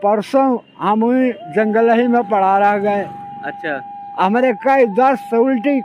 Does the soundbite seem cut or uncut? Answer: uncut